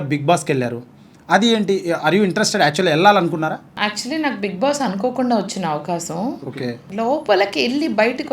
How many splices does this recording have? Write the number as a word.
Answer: two